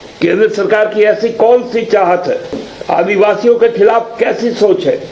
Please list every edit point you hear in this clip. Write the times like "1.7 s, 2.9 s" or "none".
2.7 s